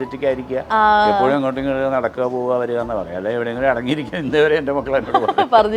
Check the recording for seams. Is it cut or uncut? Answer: uncut